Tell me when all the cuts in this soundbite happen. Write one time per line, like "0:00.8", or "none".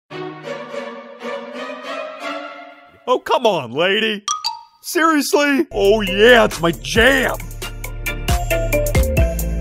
0:05.7